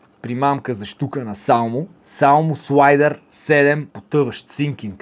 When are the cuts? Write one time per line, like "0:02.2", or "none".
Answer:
none

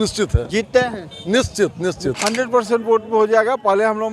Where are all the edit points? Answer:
0:02.2

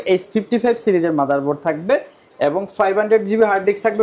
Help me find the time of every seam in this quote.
none

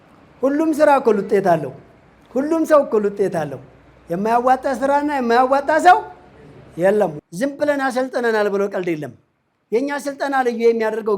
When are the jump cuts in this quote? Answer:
0:07.2

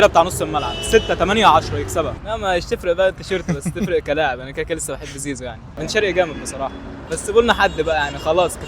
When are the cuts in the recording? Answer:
0:02.2
0:05.6

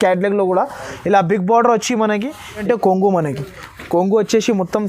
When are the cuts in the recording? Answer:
0:02.6

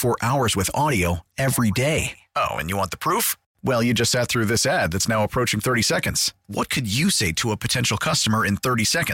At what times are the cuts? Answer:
none

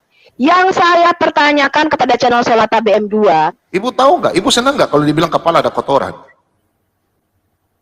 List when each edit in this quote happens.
0:03.6

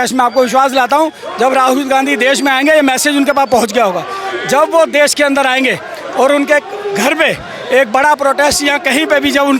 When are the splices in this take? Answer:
none

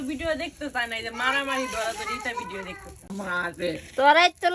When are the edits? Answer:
0:03.1

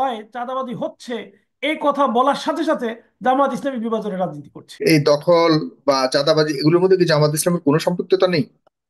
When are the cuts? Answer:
0:04.8

